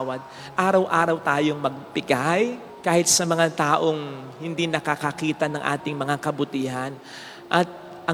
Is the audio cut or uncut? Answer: uncut